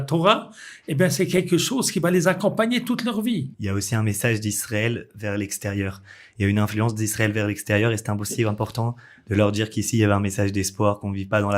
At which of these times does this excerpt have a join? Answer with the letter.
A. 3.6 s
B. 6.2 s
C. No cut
A